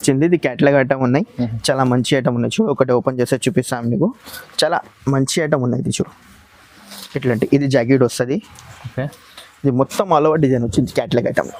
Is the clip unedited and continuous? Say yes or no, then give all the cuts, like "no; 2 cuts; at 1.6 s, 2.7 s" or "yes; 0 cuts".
yes; 0 cuts